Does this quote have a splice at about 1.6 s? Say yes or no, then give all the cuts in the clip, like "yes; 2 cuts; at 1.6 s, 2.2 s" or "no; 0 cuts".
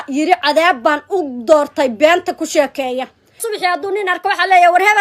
no; 1 cut; at 3.4 s